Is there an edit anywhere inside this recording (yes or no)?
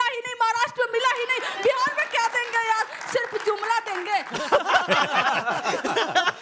no